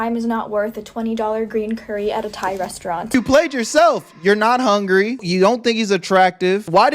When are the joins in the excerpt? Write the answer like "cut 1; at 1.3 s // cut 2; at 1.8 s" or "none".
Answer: cut 1; at 3.1 s // cut 2; at 5.2 s

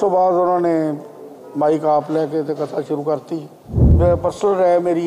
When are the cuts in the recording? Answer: cut 1; at 3.9 s

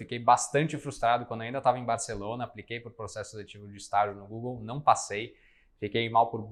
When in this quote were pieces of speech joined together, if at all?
none

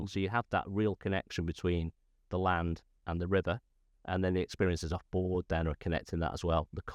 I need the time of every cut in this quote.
none

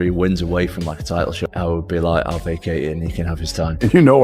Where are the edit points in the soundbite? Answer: cut 1; at 1.4 s

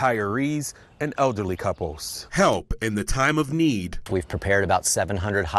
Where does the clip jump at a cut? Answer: none

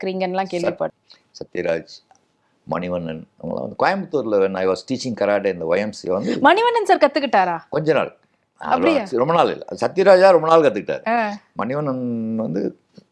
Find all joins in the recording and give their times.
cut 1; at 0.9 s

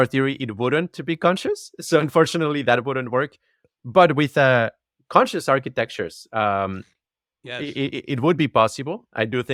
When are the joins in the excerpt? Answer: none

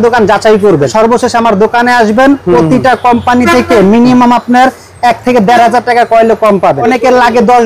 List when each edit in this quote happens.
cut 1; at 0.9 s // cut 2; at 6.8 s

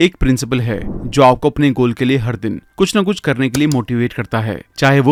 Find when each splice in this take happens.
none

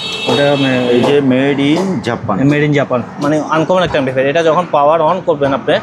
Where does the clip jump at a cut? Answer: cut 1; at 3.1 s

